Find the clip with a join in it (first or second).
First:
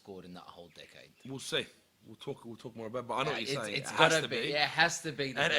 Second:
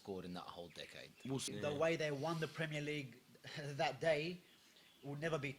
second